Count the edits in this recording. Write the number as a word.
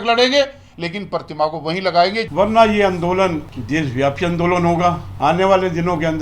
three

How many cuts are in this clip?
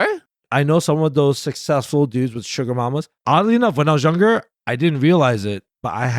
one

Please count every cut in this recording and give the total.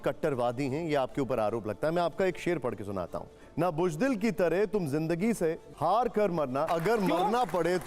three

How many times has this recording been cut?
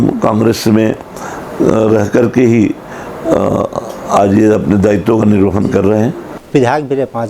one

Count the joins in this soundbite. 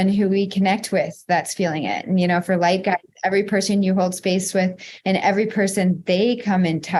zero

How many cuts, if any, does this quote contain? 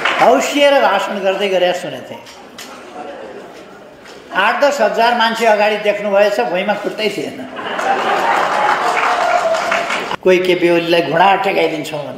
one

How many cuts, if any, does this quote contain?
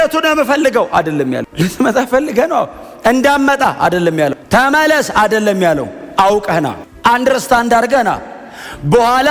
two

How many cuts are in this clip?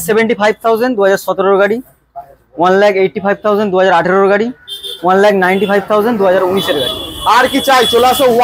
zero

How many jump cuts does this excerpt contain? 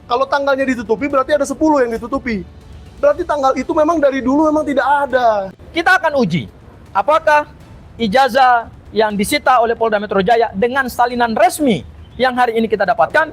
one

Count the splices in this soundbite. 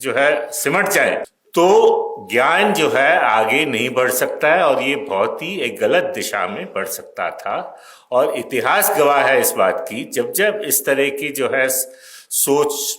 one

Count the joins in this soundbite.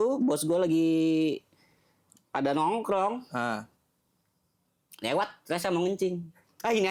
zero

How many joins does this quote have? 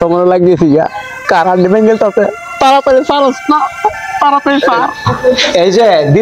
zero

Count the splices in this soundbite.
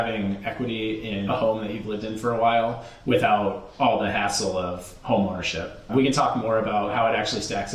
three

